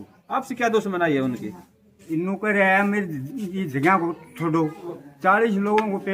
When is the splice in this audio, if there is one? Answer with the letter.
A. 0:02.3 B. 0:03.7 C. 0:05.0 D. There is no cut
C